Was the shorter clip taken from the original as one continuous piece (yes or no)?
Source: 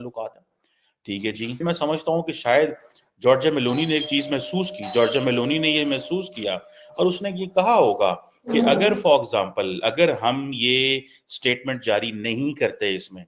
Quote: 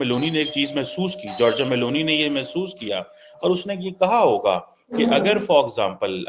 yes